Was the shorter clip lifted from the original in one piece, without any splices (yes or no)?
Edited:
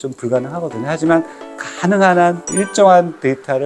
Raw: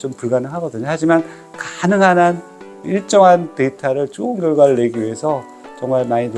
no